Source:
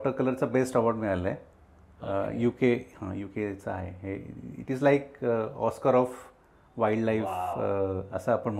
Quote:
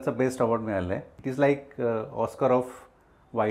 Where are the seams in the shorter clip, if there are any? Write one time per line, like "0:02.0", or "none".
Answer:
0:01.2